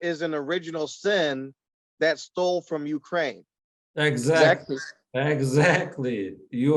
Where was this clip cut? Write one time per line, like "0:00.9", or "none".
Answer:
none